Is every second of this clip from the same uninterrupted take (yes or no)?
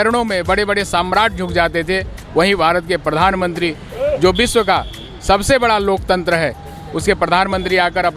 yes